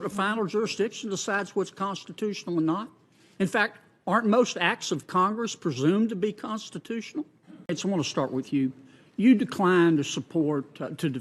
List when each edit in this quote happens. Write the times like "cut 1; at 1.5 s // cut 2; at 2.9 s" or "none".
cut 1; at 7.7 s